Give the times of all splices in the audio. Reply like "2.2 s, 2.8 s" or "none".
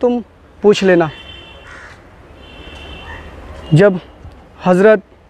none